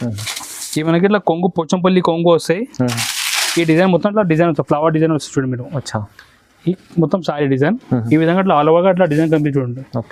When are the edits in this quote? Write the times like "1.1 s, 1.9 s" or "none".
none